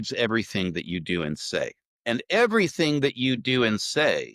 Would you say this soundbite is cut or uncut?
cut